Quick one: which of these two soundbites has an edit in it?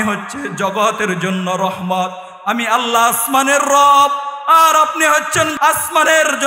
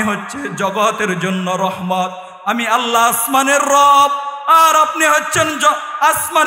first; 1 cut; at 5.5 s

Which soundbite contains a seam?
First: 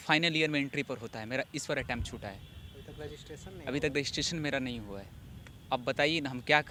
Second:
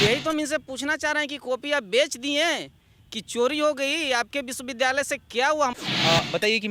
second; 1 cut; at 5.8 s

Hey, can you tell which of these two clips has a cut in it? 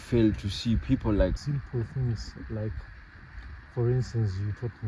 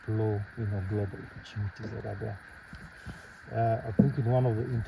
first; 1 cut; at 1.4 s

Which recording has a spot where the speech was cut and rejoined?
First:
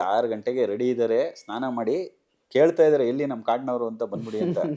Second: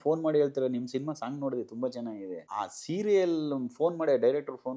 second; 1 cut; at 2.4 s

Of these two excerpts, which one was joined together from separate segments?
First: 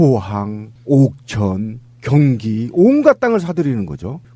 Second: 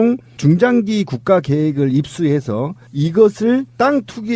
first; 1 cut; at 1.0 s

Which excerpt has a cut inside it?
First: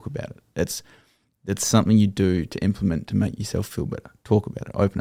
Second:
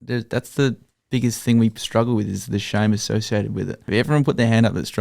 second; 1 cut; at 3.8 s

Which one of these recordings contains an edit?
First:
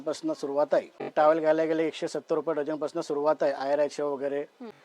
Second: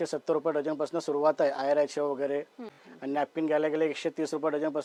first; 1 cut; at 1.1 s

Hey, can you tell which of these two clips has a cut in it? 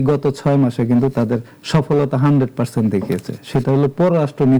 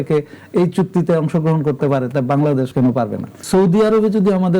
second; 1 cut; at 2.9 s

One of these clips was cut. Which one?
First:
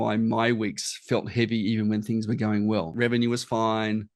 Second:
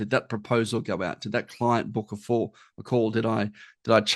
first; 1 cut; at 2.9 s

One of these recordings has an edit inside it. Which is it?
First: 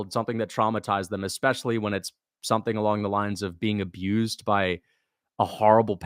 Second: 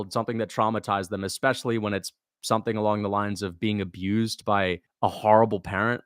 second; 1 cut; at 4.9 s

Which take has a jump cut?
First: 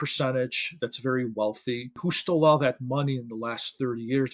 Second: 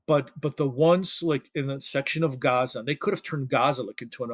first; 1 cut; at 2.0 s

